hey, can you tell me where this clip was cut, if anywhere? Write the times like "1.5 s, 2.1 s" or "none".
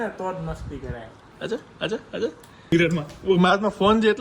1.3 s, 2.7 s